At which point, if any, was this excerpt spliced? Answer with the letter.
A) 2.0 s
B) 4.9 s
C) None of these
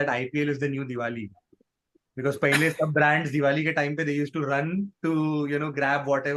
C